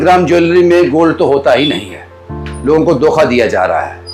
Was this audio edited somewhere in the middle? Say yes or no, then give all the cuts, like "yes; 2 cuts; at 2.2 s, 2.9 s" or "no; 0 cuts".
no; 0 cuts